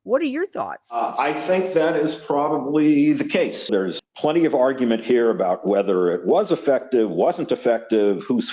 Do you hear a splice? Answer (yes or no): yes